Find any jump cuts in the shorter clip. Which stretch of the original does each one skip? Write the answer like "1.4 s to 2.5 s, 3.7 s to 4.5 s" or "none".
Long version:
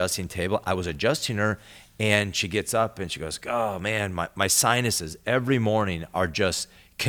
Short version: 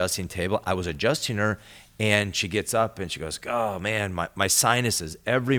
none